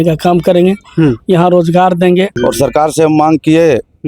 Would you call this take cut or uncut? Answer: cut